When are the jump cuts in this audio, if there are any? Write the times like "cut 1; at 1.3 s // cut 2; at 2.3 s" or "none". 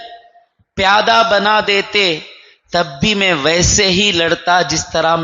none